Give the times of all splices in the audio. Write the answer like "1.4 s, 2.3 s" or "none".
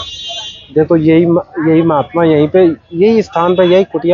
none